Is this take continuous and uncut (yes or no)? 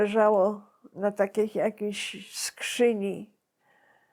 yes